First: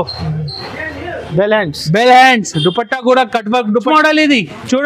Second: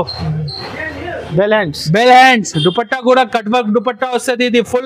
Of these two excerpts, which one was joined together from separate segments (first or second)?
first